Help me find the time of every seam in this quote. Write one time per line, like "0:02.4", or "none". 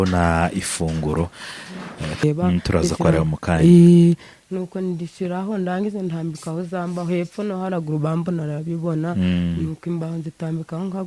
0:02.2